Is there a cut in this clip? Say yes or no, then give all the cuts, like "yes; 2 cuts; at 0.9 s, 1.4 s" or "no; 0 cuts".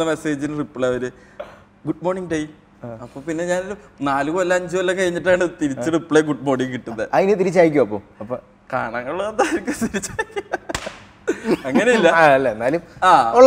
no; 0 cuts